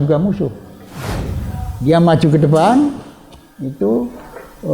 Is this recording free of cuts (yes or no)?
no